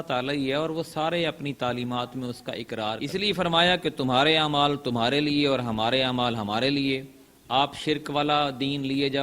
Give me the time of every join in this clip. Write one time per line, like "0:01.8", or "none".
0:03.0

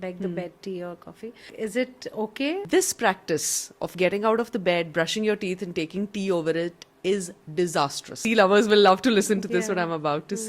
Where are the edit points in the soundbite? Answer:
0:01.5
0:02.7
0:08.1

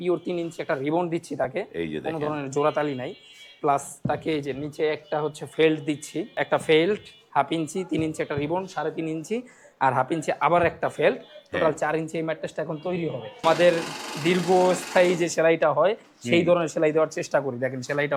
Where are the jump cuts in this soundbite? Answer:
0:06.4
0:13.4

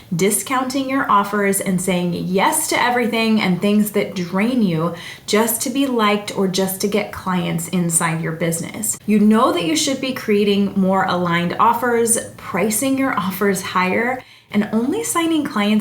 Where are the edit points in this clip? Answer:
0:08.8

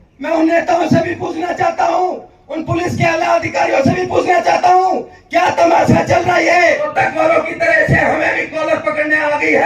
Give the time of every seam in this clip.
0:06.9

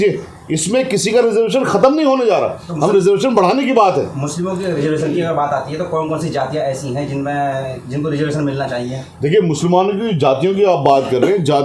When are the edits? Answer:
none

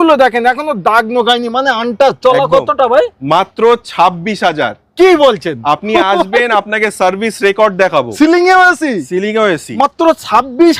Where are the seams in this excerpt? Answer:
none

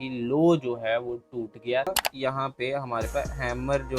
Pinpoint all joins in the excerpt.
0:02.0

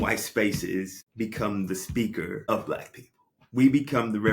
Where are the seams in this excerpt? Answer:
0:01.0
0:02.4

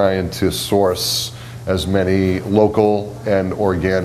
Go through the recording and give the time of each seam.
none

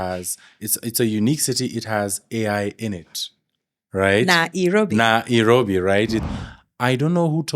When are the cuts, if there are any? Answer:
0:06.3

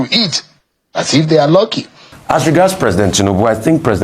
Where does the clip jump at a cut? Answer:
0:02.1

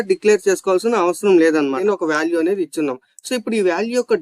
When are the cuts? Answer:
0:01.8

